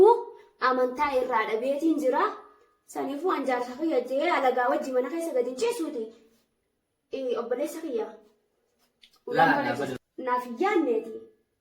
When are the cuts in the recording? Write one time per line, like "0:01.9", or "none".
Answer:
0:10.1